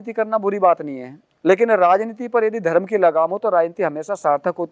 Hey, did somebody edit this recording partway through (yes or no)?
no